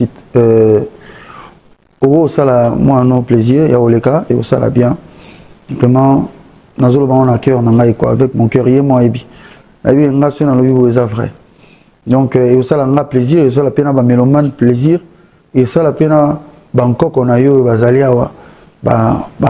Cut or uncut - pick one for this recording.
uncut